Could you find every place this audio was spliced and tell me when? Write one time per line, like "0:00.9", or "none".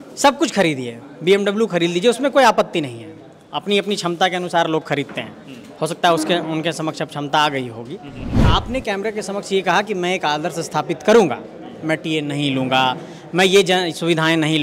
0:08.5

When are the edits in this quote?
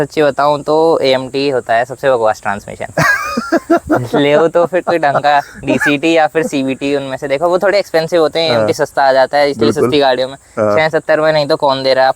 none

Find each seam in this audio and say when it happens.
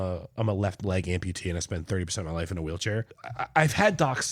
0:03.2

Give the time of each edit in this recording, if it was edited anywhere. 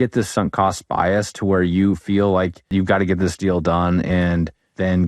0:02.7

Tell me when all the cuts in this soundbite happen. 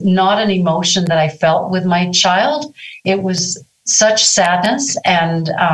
0:03.2

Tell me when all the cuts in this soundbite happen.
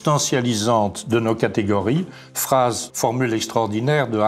0:02.9

